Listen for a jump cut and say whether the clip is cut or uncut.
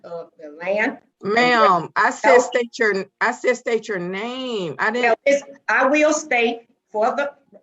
cut